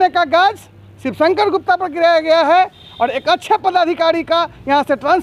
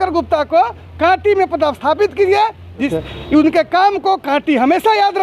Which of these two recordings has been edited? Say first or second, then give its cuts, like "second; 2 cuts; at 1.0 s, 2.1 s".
second; 1 cut; at 2.8 s